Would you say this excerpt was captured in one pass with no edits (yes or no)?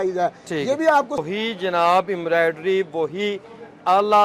no